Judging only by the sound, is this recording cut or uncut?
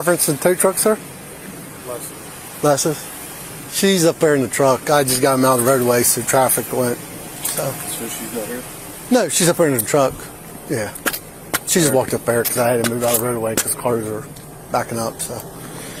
uncut